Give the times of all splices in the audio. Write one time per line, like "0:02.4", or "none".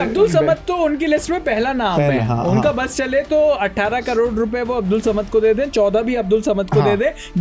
none

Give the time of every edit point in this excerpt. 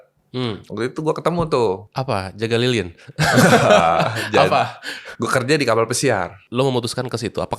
0:06.4

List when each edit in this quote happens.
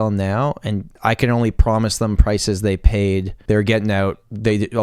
0:01.0
0:03.3

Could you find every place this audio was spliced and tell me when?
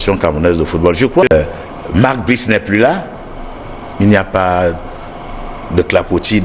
0:01.3

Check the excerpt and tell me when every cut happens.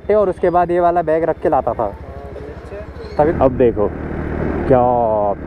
0:03.0

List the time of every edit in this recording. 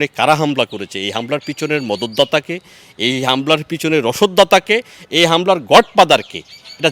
none

